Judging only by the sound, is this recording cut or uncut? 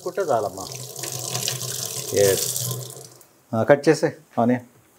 uncut